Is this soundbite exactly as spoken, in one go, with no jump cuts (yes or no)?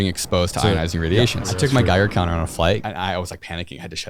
no